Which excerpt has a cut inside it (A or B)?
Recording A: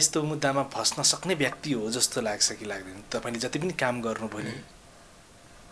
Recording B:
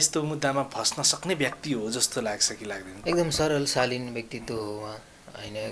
B